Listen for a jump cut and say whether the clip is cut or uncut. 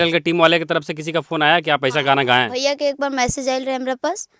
uncut